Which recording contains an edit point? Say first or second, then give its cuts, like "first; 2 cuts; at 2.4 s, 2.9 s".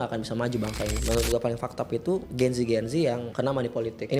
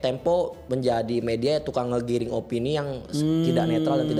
first; 3 cuts; at 1.0 s, 2.3 s, 3.5 s